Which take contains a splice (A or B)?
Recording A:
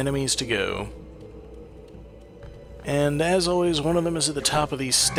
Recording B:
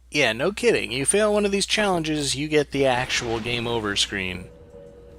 B